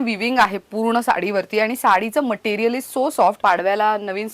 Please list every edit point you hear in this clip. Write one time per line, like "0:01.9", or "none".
0:03.4